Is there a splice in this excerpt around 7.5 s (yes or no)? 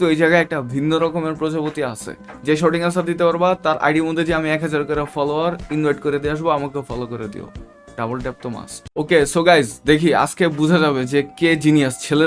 no